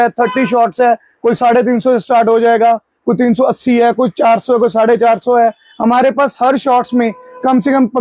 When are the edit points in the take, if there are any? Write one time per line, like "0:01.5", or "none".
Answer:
none